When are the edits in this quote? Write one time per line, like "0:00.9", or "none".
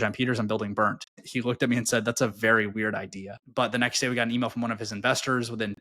0:01.3
0:03.3